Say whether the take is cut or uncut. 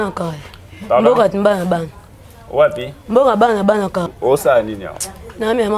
cut